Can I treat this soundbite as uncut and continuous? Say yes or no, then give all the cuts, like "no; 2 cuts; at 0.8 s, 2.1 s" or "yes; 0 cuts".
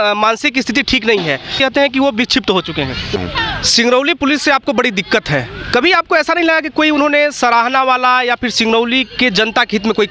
no; 2 cuts; at 1.5 s, 3.2 s